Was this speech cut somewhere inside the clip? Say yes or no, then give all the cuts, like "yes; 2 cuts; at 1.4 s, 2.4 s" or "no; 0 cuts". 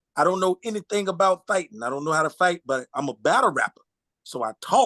no; 0 cuts